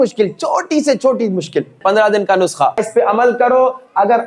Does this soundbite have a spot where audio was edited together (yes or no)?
yes